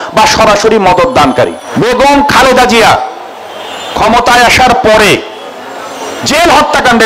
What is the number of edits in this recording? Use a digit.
1